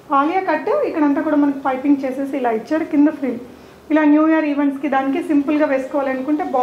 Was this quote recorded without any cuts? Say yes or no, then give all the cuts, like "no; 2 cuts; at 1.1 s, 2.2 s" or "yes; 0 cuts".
yes; 0 cuts